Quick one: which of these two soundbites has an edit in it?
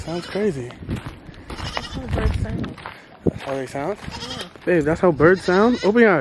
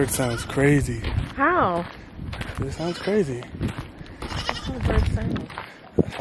first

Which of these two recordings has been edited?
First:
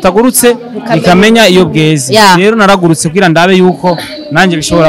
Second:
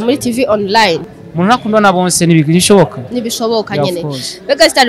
second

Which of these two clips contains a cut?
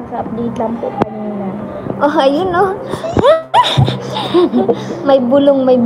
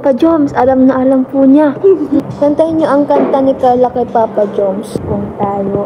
second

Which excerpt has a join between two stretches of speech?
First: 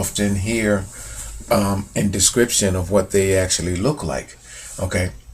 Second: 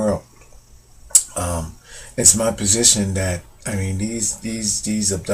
first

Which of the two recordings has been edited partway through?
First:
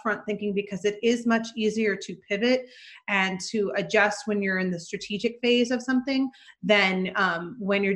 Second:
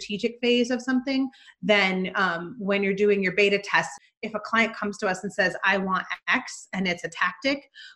second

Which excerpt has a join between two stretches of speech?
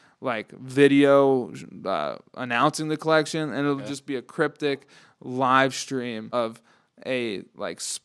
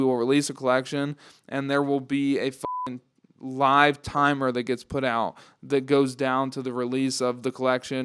first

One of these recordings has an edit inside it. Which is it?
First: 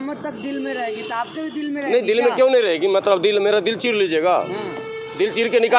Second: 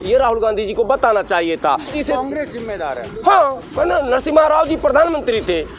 second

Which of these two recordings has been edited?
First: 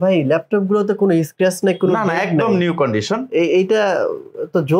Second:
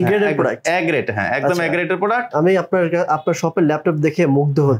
second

